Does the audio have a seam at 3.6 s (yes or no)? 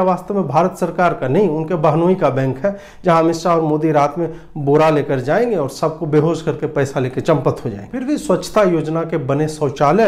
no